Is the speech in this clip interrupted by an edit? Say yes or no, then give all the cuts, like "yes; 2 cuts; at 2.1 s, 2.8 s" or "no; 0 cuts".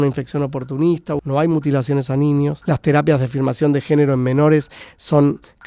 yes; 2 cuts; at 1.2 s, 2.6 s